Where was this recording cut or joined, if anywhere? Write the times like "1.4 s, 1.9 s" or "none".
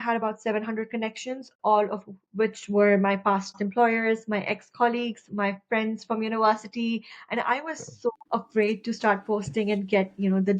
8.2 s